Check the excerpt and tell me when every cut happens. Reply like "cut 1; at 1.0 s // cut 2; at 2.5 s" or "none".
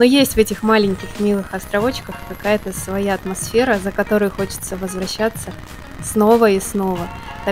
none